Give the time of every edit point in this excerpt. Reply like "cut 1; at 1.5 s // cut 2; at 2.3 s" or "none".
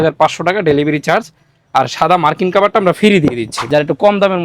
cut 1; at 3.5 s